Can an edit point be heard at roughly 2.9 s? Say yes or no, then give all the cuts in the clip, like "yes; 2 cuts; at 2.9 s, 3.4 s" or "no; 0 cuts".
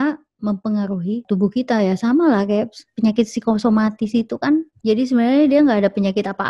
no; 2 cuts; at 1.2 s, 4.7 s